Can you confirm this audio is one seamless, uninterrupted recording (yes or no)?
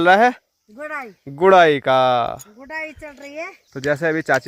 yes